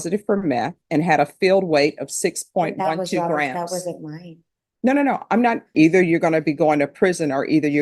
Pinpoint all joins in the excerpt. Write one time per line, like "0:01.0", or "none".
0:05.7

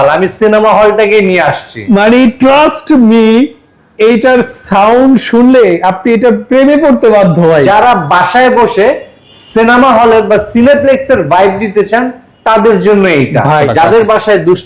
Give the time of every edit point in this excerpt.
0:07.6
0:13.6

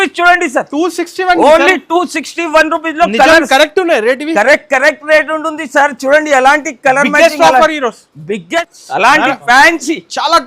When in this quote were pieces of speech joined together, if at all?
0:08.5

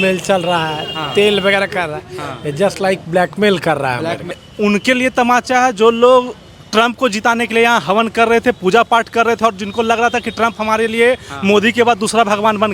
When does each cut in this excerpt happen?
0:04.5

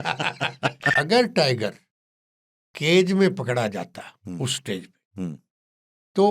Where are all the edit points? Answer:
0:00.9

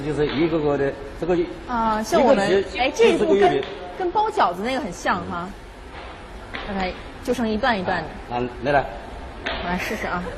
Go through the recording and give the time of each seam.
0:06.3

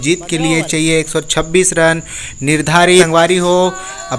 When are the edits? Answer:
0:03.1

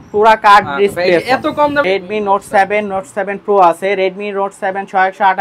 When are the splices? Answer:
0:01.9

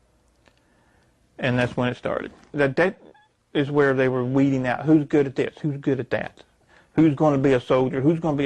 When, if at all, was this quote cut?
0:02.5

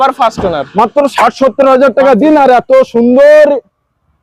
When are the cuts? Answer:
none

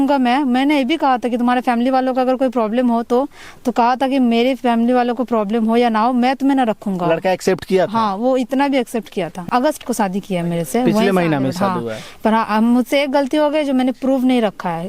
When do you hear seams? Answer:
0:09.5

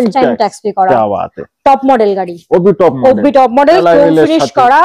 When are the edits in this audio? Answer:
none

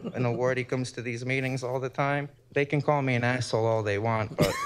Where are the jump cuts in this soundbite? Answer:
0:02.4

